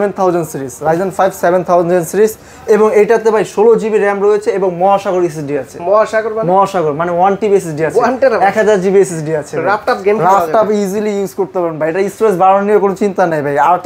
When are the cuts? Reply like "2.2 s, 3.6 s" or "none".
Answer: none